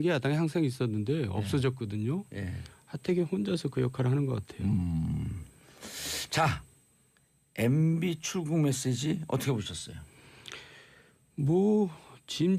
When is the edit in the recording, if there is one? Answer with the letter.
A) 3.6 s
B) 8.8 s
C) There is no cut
B